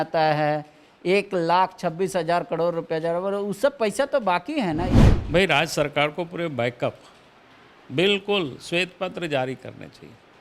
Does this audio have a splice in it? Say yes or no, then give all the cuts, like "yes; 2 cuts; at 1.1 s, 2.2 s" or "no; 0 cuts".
yes; 1 cut; at 5.0 s